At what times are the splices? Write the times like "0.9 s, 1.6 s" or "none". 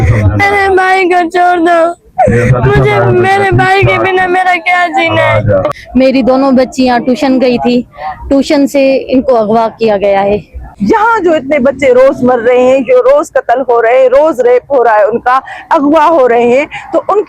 5.6 s, 10.7 s